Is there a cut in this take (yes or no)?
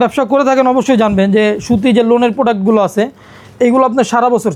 no